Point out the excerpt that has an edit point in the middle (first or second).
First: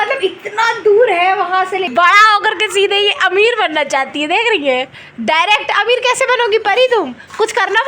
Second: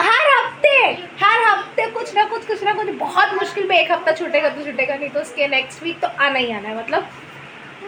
first